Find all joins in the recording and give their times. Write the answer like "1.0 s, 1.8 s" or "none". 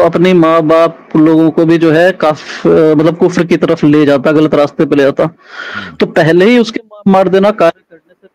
none